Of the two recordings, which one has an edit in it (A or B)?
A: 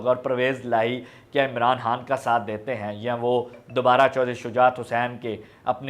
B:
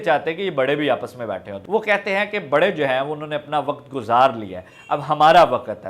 B